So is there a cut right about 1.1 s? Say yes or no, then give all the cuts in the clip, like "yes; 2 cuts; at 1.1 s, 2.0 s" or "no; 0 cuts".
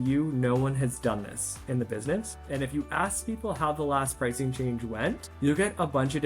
no; 2 cuts; at 2.4 s, 5.3 s